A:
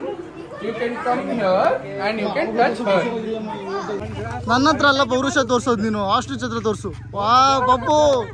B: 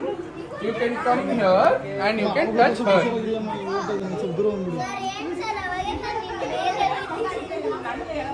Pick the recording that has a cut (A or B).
A